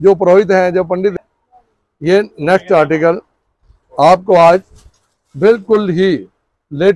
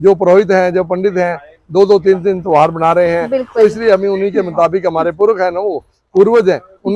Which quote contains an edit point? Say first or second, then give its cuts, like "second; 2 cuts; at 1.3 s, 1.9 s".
first; 1 cut; at 1.1 s